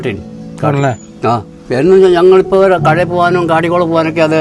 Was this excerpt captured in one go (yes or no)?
no